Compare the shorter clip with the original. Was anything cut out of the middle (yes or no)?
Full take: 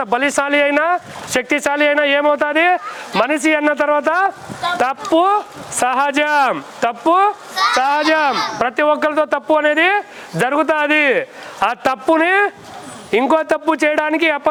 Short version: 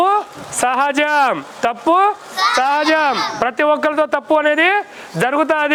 no